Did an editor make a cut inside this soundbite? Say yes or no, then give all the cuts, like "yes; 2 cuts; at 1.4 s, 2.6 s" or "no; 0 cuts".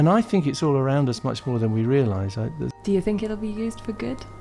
yes; 1 cut; at 2.8 s